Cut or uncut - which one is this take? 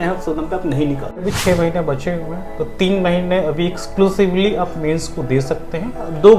cut